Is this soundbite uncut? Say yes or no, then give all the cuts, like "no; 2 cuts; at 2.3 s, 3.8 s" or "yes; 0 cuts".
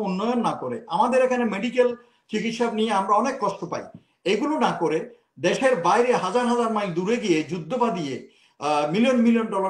yes; 0 cuts